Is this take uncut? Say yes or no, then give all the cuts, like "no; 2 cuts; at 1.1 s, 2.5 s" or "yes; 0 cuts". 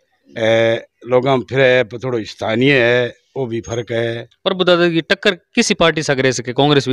no; 1 cut; at 4.3 s